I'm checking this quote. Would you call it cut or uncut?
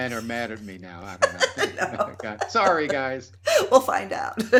uncut